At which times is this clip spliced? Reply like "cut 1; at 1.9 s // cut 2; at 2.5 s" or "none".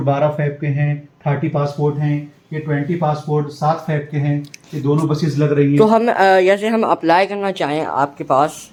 none